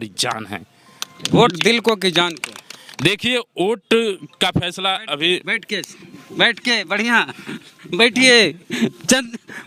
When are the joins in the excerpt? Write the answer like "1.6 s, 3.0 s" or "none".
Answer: none